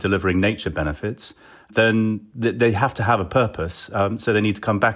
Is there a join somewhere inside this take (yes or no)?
no